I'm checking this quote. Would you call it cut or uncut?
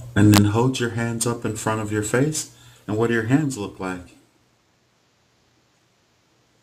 uncut